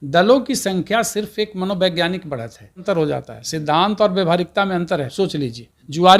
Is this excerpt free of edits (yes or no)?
no